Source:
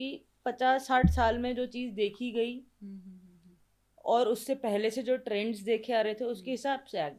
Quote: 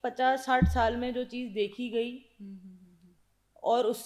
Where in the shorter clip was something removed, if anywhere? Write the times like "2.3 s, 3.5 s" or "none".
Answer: none

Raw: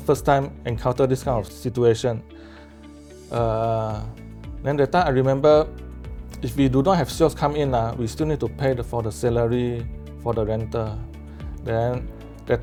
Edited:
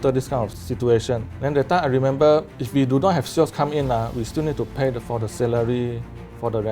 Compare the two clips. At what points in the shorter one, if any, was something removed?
1.3 s, 2.6 s

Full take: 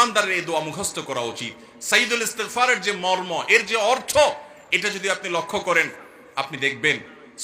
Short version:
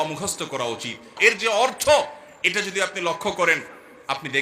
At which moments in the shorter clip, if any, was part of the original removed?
1.2 s

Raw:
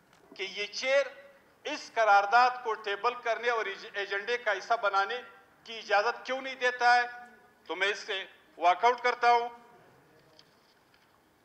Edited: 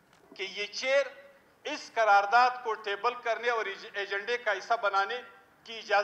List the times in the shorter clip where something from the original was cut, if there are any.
none

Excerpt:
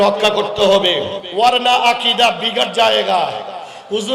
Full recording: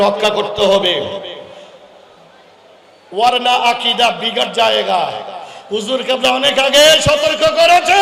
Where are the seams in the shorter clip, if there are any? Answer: 1.2 s

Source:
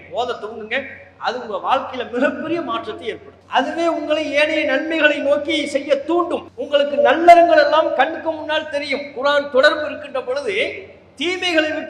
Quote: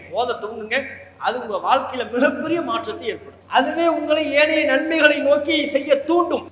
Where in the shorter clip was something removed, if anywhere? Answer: none

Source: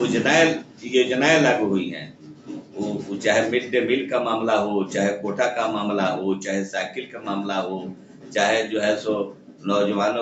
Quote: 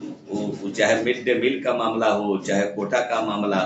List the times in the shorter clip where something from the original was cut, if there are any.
none

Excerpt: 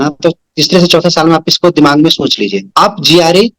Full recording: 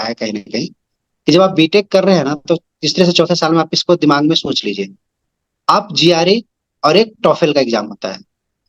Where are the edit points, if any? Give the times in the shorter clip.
2.6 s

